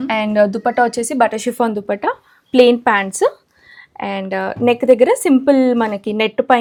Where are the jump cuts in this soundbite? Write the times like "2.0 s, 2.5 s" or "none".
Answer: none